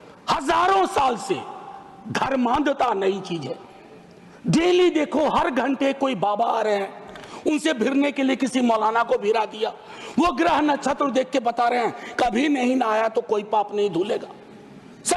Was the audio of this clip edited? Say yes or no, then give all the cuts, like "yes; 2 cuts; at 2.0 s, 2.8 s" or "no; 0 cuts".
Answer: no; 0 cuts